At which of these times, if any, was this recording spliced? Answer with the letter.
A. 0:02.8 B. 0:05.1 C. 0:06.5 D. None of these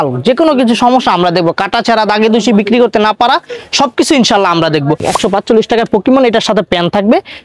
B